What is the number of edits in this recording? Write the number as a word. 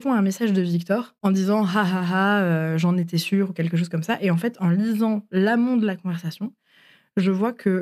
one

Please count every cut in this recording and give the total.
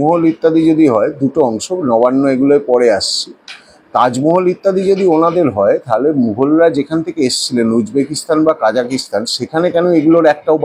zero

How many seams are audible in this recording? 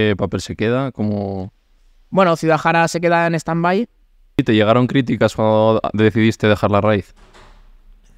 one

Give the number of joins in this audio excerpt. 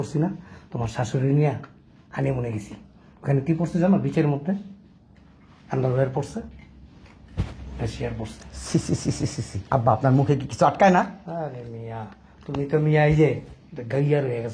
zero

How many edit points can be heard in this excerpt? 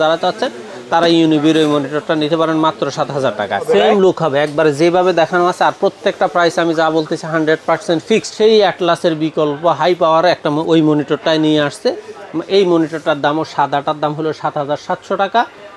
two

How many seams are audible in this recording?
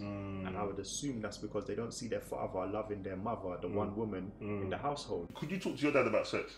one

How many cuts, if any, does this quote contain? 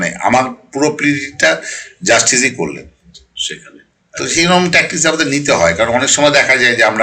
zero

